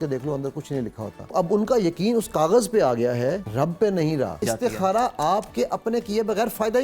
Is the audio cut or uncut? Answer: cut